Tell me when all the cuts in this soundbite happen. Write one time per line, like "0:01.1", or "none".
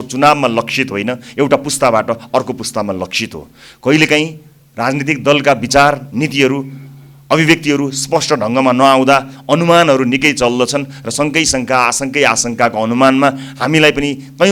none